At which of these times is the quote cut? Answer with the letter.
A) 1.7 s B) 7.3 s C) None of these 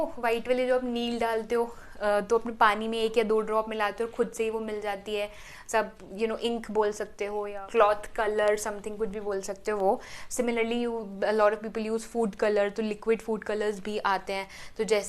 B